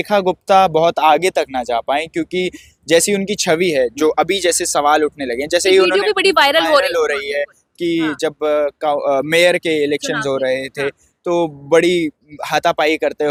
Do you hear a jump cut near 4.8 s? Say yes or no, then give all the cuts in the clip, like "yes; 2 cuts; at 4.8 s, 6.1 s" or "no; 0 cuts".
no; 0 cuts